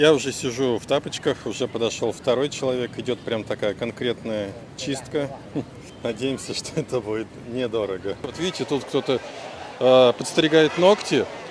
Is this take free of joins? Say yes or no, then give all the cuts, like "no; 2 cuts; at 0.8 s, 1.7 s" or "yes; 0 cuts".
no; 2 cuts; at 5.8 s, 8.4 s